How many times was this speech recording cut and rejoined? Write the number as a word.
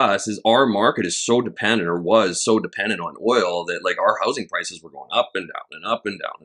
zero